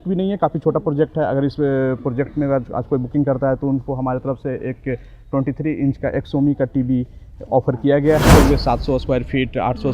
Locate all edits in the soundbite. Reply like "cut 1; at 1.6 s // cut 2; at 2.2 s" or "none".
cut 1; at 8.3 s